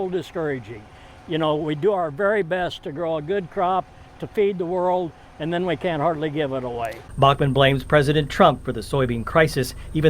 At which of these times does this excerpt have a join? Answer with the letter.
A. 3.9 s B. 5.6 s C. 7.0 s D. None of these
C